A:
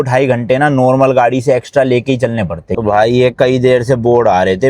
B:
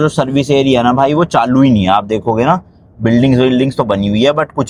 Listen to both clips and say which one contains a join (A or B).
A